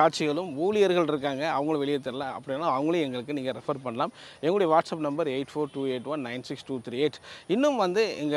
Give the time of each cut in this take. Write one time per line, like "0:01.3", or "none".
none